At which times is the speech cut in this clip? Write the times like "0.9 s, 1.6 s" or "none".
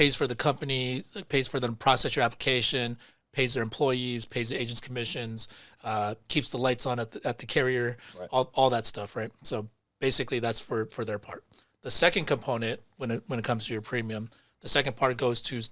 none